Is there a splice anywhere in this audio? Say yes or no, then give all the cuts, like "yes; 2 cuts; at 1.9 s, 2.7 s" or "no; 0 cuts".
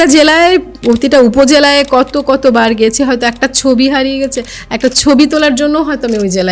no; 0 cuts